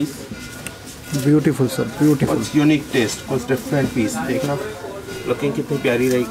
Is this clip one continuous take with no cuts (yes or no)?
yes